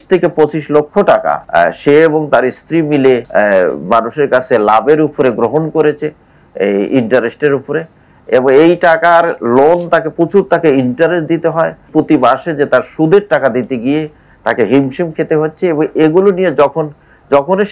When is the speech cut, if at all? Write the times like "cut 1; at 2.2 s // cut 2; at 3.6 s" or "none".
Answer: cut 1; at 1.4 s // cut 2; at 3.3 s // cut 3; at 11.9 s